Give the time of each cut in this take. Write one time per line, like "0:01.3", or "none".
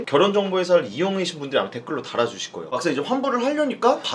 0:02.8